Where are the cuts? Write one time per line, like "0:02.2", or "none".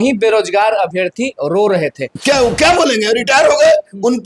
0:02.1